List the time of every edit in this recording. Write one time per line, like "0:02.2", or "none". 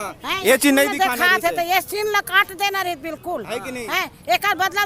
none